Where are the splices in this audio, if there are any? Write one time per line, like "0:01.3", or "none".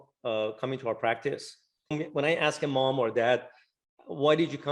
0:01.9